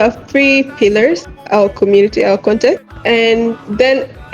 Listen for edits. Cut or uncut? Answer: cut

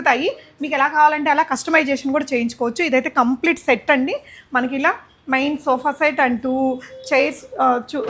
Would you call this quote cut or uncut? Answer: uncut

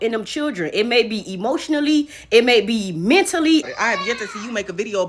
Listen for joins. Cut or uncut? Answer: cut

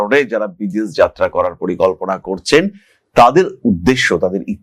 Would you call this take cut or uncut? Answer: uncut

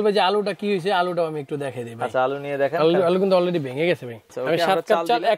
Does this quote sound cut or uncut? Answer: cut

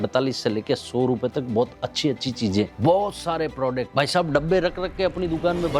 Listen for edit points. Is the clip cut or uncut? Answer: uncut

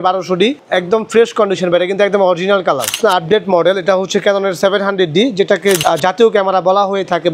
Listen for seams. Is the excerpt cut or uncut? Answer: cut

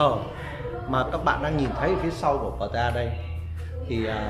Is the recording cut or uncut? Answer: uncut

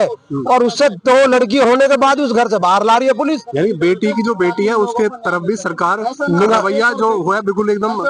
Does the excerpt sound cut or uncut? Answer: uncut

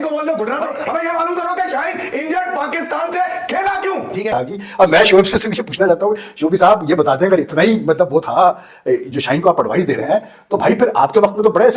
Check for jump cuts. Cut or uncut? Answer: cut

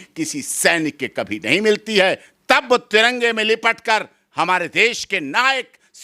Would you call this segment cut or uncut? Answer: uncut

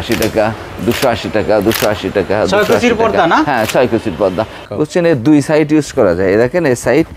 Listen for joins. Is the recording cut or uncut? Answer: cut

